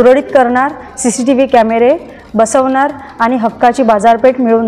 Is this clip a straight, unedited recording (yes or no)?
yes